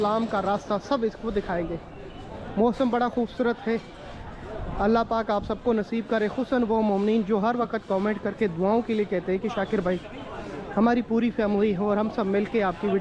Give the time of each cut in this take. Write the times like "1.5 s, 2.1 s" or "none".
none